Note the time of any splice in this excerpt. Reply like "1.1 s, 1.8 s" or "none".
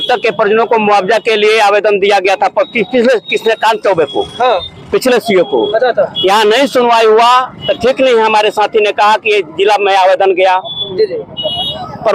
none

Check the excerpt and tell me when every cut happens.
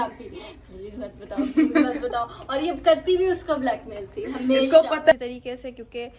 5.1 s

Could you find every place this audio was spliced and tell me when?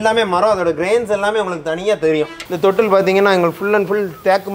2.4 s

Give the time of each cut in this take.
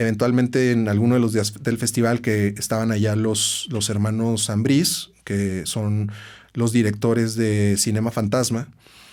none

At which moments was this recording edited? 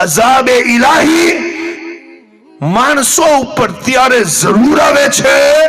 none

